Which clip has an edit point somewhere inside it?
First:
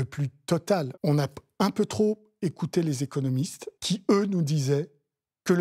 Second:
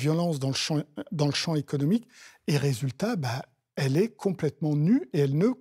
first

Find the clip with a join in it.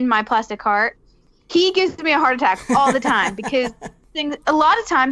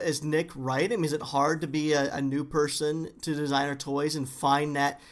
first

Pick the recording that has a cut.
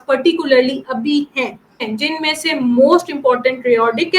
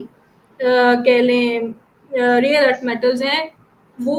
first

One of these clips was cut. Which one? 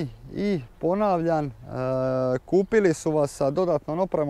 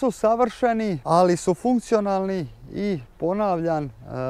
second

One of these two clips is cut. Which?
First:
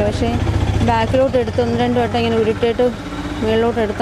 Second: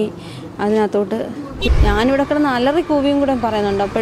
second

